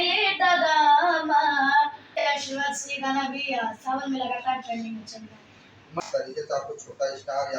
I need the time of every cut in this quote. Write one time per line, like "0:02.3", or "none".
0:02.2
0:06.0